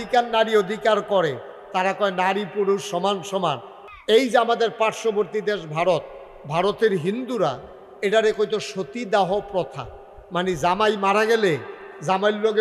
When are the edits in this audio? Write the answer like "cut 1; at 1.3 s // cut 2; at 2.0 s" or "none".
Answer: cut 1; at 3.8 s